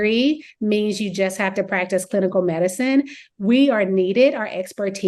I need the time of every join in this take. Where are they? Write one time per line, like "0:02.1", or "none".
none